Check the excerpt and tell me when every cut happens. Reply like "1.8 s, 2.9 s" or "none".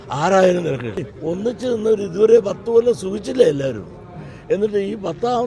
1.1 s

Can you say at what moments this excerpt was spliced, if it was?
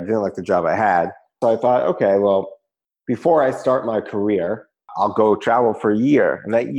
1.4 s, 4.9 s

